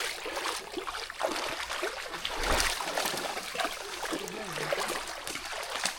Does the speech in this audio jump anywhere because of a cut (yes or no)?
no